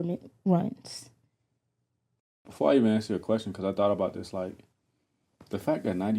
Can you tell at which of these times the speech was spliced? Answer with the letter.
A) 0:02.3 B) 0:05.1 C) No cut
A